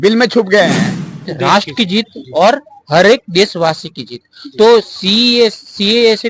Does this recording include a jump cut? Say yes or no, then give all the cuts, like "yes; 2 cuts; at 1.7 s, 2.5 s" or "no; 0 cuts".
yes; 1 cut; at 1.3 s